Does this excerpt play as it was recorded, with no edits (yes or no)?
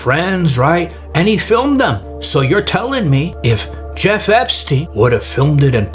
no